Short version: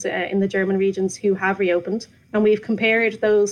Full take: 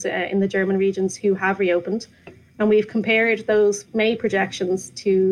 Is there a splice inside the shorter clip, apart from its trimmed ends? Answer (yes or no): yes